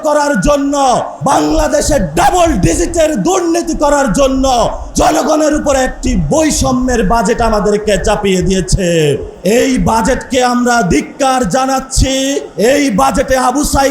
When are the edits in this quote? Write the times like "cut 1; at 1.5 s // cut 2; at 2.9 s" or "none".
cut 1; at 1.1 s // cut 2; at 4.8 s // cut 3; at 9.3 s // cut 4; at 12.5 s

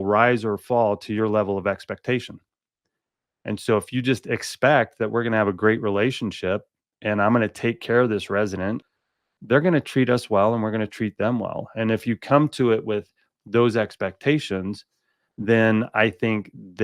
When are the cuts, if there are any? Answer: cut 1; at 8.8 s

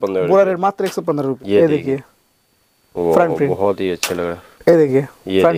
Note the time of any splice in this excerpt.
cut 1; at 1.4 s // cut 2; at 4.5 s

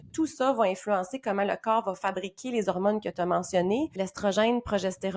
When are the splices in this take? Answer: cut 1; at 4.0 s

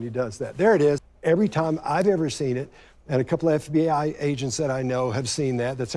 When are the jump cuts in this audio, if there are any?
cut 1; at 1.1 s

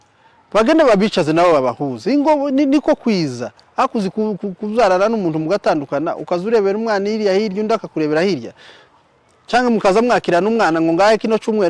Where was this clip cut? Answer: none

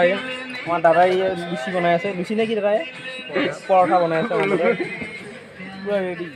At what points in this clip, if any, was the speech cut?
none

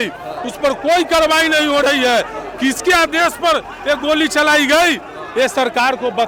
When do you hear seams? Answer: none

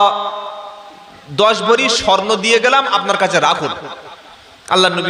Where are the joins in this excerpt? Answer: none

